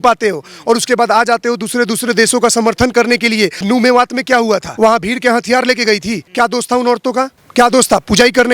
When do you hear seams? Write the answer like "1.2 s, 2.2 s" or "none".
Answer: 3.6 s, 4.7 s, 6.2 s